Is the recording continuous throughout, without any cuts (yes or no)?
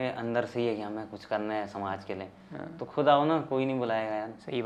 yes